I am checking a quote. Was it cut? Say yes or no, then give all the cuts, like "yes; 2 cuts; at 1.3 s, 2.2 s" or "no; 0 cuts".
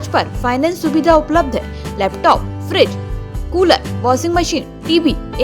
no; 0 cuts